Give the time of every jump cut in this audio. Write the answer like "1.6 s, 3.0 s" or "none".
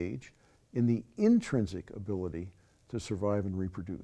1.1 s